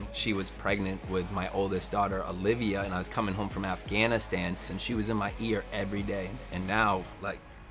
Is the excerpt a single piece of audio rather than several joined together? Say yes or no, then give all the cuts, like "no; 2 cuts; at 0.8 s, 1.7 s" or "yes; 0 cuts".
no; 2 cuts; at 4.7 s, 6.5 s